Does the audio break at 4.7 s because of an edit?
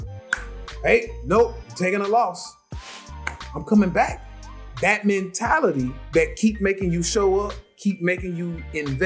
yes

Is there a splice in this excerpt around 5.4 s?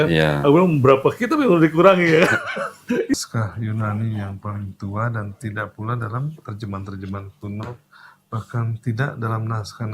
no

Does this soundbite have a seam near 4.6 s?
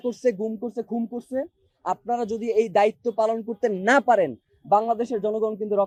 no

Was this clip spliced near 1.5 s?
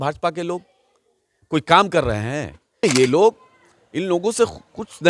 no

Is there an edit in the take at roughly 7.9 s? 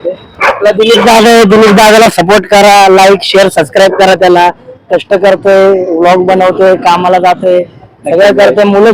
no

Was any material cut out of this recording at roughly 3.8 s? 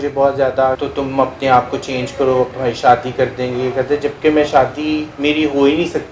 no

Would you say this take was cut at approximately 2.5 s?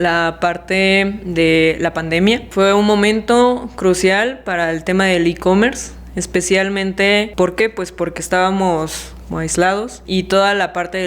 yes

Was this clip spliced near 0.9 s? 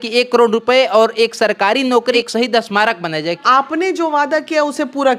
no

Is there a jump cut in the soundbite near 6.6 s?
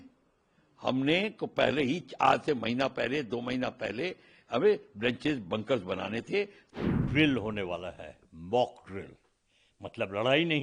yes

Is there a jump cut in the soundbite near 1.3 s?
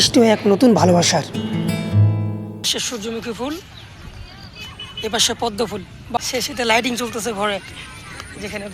no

